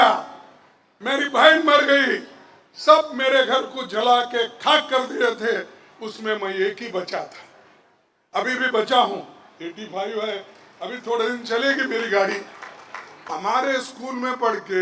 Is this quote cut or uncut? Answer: cut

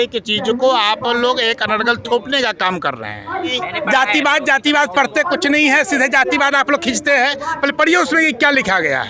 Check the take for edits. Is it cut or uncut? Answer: cut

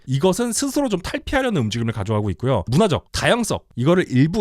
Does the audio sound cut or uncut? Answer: cut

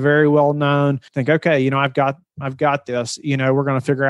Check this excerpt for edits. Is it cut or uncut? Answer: cut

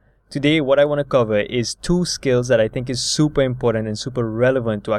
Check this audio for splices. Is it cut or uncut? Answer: uncut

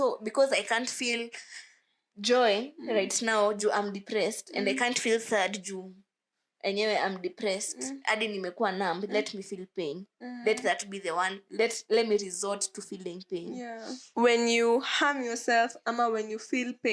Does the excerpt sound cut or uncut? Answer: cut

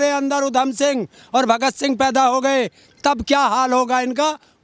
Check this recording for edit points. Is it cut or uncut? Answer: uncut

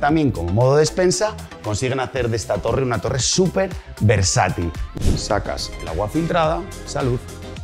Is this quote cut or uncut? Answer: cut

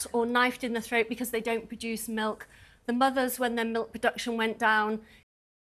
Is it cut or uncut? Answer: uncut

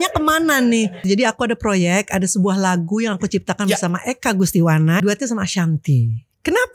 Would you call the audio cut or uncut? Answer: cut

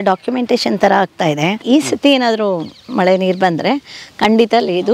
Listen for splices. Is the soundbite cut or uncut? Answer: cut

